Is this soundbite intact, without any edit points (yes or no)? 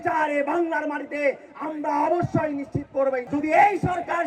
no